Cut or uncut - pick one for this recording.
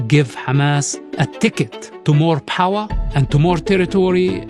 cut